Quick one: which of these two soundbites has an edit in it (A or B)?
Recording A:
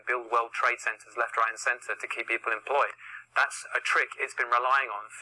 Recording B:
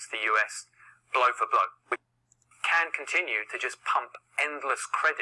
B